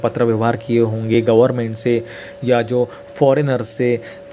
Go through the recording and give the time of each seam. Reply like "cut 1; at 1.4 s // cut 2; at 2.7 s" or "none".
none